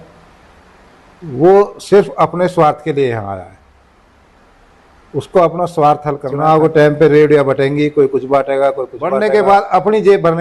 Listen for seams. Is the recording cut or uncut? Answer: cut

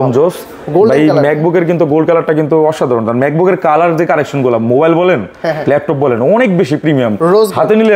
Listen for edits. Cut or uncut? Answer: uncut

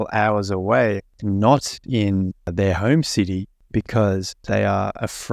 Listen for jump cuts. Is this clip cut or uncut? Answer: cut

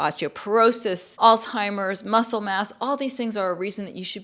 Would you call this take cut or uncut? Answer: cut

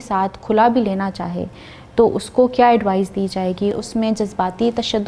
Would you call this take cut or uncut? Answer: cut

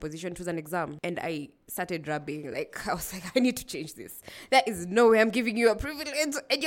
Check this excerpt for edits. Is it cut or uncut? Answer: uncut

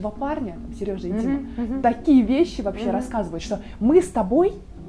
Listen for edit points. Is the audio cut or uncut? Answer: uncut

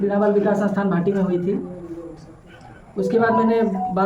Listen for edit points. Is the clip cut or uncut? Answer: uncut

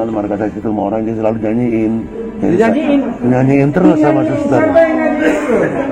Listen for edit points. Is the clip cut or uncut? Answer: cut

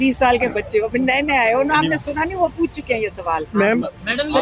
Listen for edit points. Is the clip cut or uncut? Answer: uncut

